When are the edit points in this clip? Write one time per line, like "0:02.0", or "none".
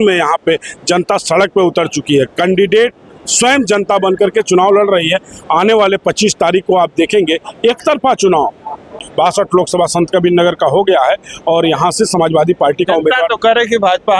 none